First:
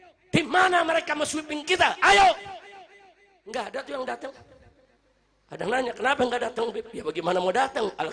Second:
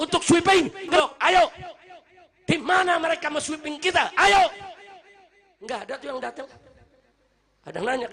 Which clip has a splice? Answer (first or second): second